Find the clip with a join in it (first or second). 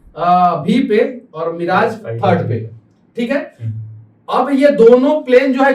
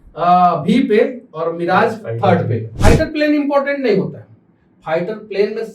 second